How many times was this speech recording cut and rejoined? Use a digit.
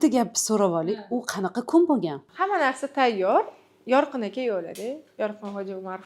1